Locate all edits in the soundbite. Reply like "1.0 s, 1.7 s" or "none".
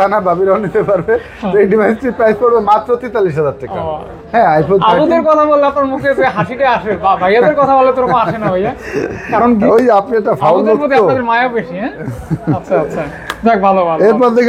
none